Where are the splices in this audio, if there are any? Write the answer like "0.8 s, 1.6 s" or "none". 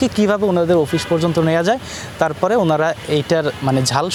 none